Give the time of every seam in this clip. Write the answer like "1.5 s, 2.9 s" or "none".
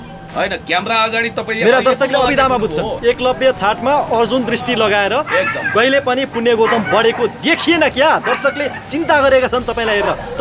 2.9 s